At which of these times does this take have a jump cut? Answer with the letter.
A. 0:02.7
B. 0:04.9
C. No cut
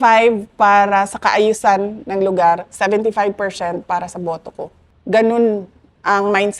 B